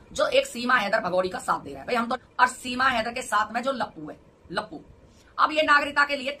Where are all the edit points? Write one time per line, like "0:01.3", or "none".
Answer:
0:02.2
0:05.1